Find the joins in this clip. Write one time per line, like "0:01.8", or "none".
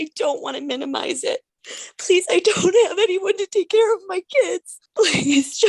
0:01.6
0:04.8